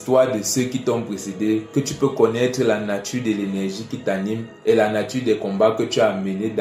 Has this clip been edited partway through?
no; 0 cuts

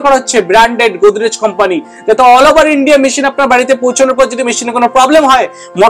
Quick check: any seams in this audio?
no; 0 cuts

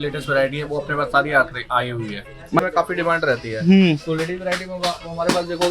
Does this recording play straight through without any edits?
no; 1 cut; at 2.6 s

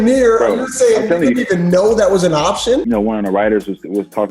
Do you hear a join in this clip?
yes; 1 cut; at 2.8 s

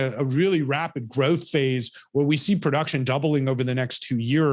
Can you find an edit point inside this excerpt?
no; 0 cuts

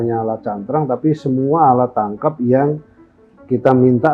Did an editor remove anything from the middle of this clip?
no; 0 cuts

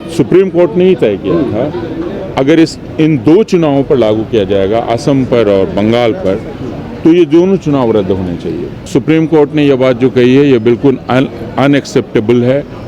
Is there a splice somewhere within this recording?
yes; 1 cut; at 8.9 s

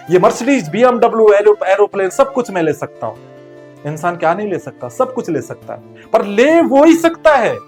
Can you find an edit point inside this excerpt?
no; 0 cuts

